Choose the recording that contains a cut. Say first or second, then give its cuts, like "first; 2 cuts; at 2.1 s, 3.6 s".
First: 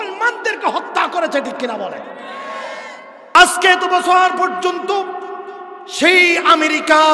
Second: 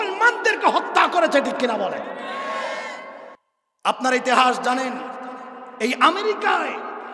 first; 1 cut; at 3.4 s